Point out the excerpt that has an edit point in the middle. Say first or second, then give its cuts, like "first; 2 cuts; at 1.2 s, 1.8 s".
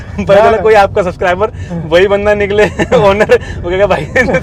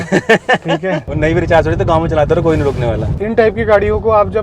second; 2 cuts; at 1.1 s, 3.1 s